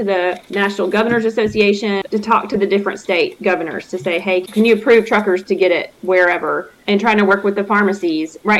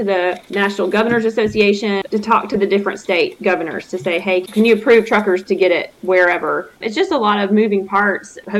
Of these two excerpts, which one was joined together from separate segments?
second; 1 cut; at 6.7 s

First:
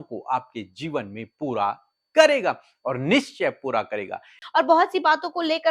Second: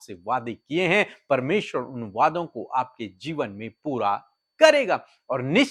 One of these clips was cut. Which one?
first; 1 cut; at 4.4 s

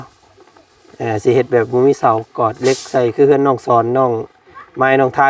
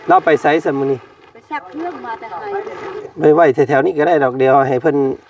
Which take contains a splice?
second; 1 cut; at 3.0 s

